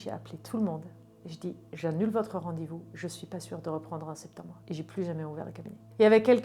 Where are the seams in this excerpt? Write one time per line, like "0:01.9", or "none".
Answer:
none